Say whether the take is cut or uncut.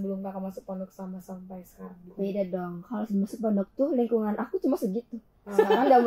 uncut